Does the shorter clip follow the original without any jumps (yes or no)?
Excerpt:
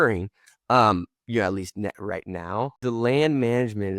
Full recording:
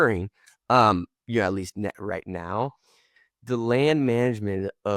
no